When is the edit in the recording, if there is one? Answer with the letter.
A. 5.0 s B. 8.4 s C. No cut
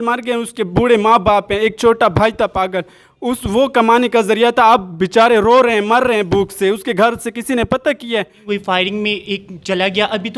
B